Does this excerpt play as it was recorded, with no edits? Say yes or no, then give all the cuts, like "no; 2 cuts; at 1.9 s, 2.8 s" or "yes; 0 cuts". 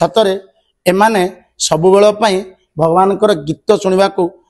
yes; 0 cuts